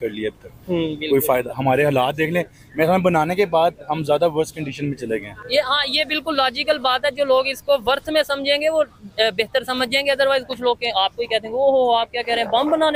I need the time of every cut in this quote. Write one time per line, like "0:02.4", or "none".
none